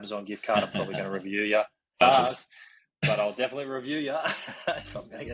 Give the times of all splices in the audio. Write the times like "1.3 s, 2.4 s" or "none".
2.0 s